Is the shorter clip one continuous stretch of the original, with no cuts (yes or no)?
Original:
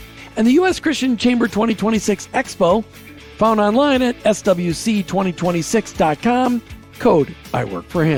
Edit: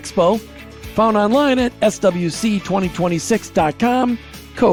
yes